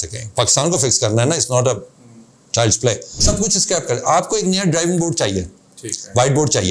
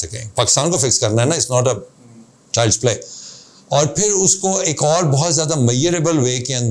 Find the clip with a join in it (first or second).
first